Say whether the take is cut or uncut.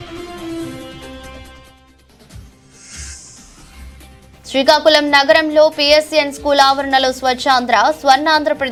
uncut